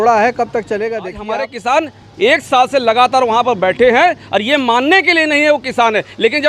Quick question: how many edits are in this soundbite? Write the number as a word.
one